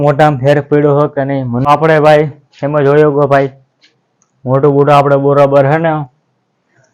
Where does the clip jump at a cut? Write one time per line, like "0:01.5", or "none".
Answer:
0:01.5